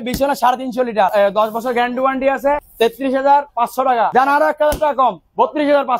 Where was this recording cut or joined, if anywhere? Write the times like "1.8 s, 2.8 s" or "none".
1.1 s, 2.7 s, 4.1 s

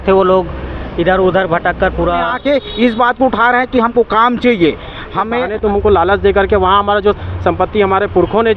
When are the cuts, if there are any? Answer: 2.3 s, 5.4 s

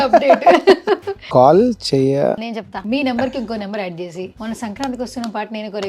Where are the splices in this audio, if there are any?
1.1 s, 2.5 s, 4.3 s

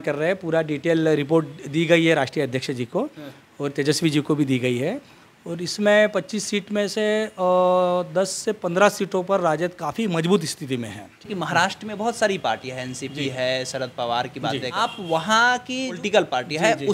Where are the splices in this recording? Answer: 11.3 s, 14.8 s, 16.0 s

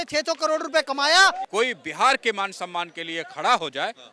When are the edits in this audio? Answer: 1.4 s

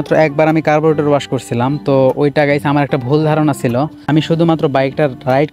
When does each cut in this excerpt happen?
4.0 s

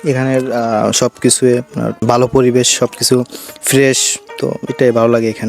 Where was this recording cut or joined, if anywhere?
2.0 s

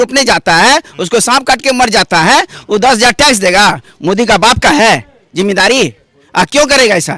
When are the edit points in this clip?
none

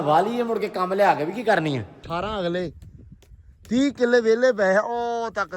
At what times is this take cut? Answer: 2.1 s

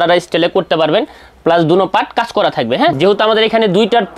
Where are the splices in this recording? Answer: 2.9 s

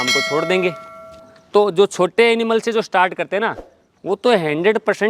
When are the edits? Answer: 1.1 s

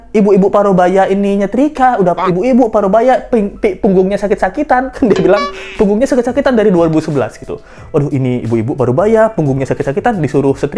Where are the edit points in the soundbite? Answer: none

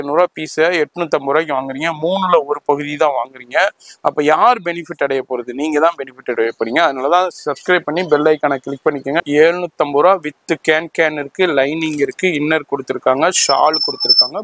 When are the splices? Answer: 9.2 s

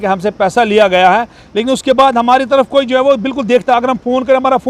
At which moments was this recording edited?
none

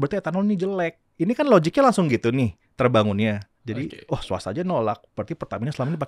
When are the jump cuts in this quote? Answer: 1.0 s, 3.5 s

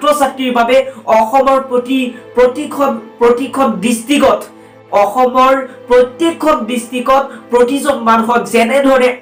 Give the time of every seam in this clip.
none

